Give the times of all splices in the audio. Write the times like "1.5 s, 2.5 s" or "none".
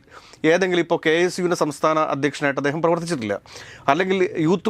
none